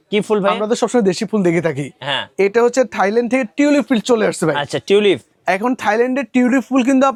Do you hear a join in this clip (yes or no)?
no